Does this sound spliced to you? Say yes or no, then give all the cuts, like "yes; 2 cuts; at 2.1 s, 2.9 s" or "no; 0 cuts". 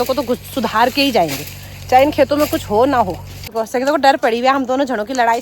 yes; 1 cut; at 3.5 s